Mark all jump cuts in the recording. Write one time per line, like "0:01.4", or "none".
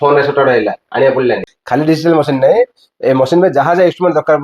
0:01.5